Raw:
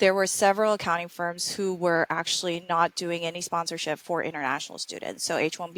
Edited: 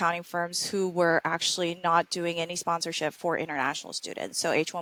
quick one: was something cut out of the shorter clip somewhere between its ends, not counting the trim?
no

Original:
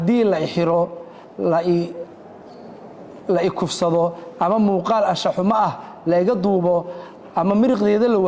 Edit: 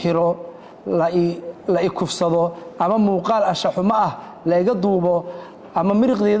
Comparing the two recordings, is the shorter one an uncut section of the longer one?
no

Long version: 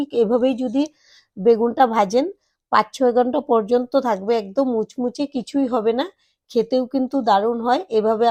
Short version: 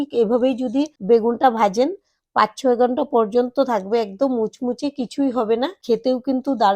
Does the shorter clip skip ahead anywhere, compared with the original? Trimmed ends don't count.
yes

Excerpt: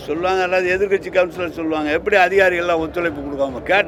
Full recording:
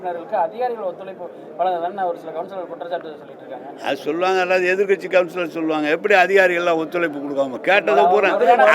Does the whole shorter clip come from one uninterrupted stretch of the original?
yes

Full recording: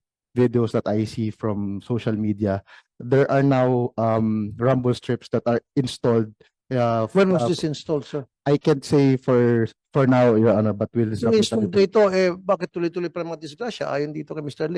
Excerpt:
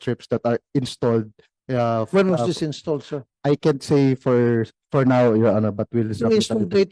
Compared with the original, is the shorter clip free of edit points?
yes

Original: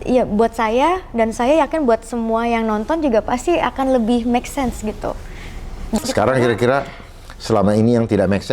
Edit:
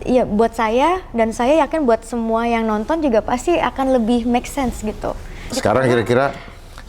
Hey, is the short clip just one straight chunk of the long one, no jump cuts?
no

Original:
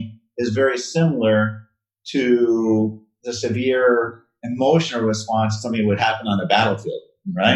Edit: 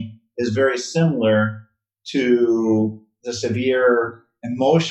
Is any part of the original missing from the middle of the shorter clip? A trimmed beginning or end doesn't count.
no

